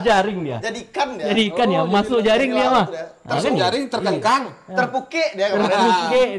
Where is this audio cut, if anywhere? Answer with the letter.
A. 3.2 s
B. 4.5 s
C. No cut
C